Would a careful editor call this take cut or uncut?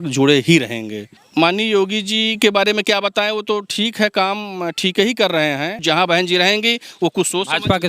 cut